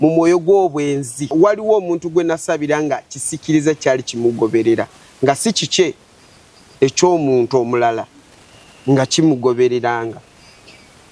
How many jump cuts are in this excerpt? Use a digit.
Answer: 1